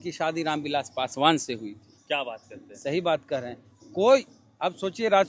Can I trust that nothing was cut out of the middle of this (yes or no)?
yes